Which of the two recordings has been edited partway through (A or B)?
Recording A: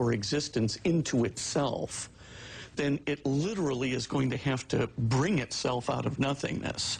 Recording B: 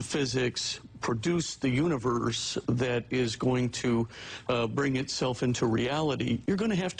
A